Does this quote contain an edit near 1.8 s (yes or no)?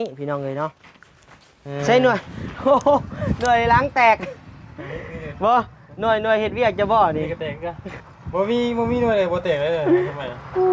yes